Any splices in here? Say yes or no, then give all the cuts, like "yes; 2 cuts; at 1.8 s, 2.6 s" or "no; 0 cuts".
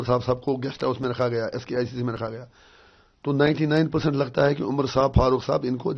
no; 0 cuts